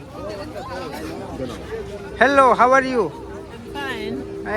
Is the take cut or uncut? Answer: uncut